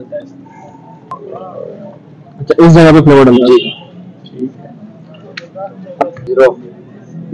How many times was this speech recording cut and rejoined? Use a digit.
2